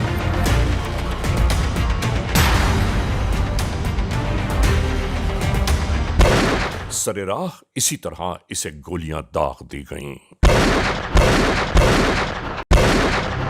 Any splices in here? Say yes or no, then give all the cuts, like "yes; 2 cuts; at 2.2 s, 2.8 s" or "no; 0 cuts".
no; 0 cuts